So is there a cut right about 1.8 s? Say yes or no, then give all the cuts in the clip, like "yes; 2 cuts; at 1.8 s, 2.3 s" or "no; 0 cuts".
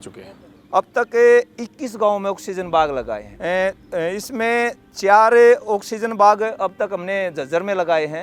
no; 1 cut; at 3.2 s